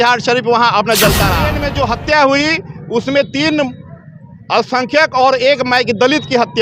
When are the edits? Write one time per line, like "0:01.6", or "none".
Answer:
0:01.6